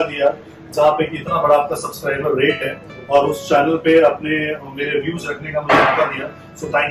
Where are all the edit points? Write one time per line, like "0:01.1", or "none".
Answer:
none